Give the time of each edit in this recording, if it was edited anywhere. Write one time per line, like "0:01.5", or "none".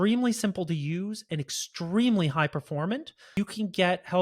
0:03.2